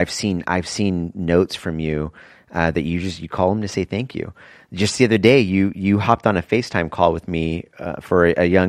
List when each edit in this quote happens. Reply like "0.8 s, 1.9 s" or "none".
none